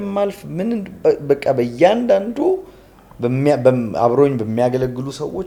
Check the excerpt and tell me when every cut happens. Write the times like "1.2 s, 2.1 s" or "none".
none

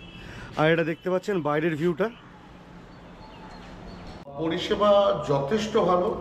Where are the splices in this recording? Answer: 4.4 s

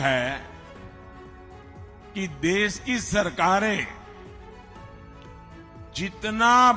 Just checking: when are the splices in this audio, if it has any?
none

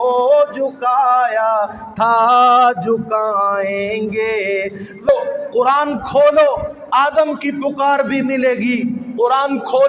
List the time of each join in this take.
5.1 s

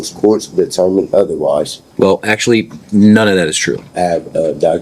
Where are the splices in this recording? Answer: 1.8 s, 3.9 s

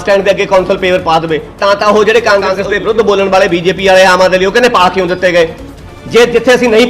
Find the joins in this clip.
1.5 s, 2.5 s

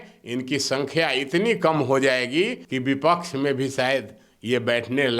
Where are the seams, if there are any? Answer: 2.6 s

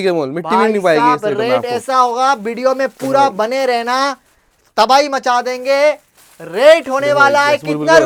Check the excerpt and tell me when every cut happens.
none

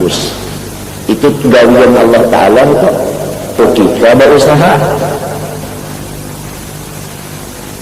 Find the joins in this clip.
3.6 s

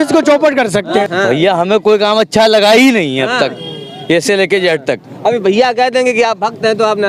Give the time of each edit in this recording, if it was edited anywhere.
1.1 s

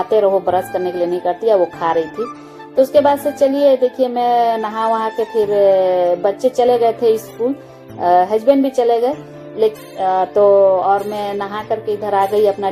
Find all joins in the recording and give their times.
none

